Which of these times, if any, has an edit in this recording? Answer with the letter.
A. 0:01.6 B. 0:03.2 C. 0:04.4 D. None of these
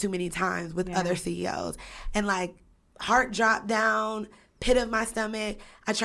D